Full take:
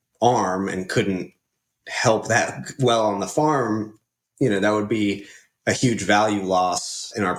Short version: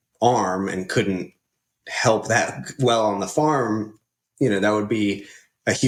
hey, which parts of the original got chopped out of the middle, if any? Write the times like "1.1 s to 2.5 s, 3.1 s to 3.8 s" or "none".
none